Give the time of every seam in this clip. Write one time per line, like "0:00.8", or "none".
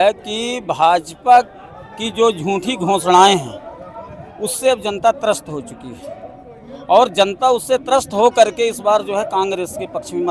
none